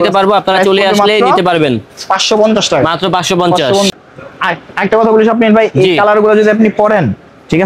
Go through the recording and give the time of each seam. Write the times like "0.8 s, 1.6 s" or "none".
3.9 s